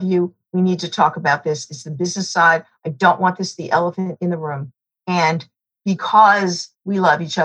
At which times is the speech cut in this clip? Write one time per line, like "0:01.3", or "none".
0:04.4